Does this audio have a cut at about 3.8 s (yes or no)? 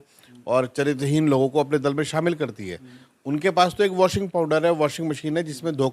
no